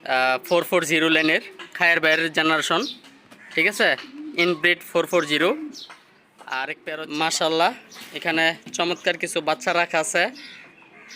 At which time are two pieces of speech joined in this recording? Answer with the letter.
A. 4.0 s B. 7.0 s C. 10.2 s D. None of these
B